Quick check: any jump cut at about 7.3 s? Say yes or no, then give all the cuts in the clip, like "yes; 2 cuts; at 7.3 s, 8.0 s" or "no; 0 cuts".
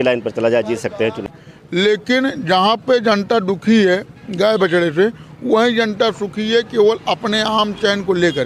no; 1 cut; at 1.2 s